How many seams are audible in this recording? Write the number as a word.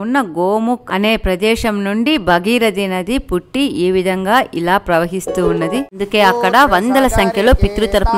one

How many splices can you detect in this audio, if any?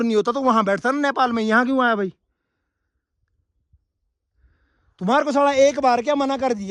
zero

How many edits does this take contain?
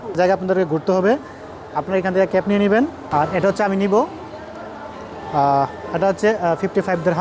one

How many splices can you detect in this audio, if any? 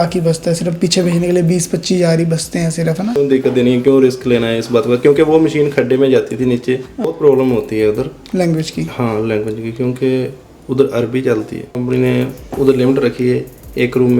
three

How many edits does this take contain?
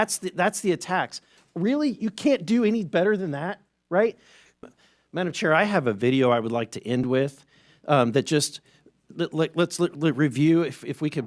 one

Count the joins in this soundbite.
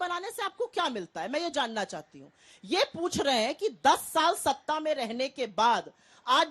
one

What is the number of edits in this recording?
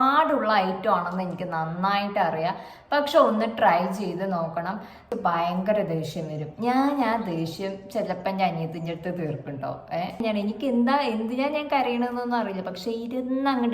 two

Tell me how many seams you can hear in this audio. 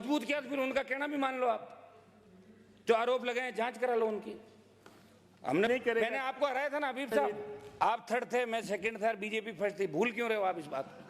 one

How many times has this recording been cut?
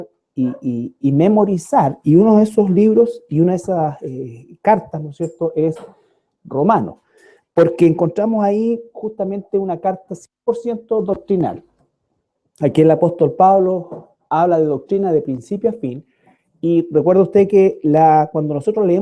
one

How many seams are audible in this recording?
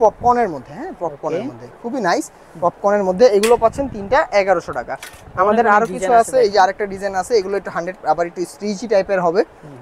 zero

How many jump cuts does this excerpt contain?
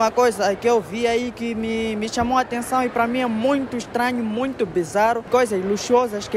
one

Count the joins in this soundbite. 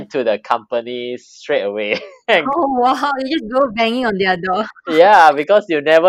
one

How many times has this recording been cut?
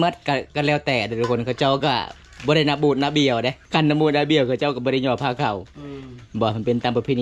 one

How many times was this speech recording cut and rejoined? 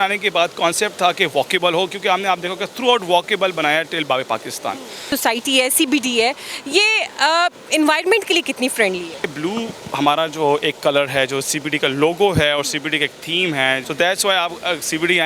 three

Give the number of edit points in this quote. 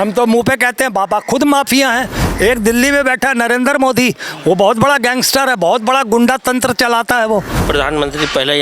two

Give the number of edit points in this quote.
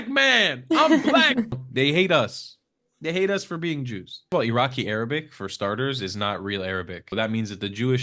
three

